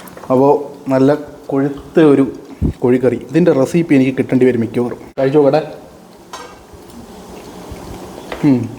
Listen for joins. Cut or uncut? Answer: cut